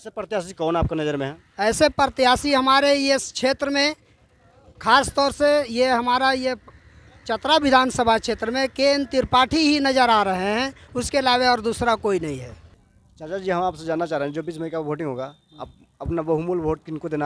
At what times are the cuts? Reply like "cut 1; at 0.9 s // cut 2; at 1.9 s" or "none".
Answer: cut 1; at 12.6 s